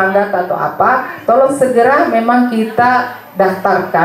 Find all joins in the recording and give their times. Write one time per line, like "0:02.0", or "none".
none